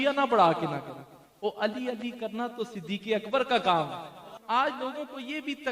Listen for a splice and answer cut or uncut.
cut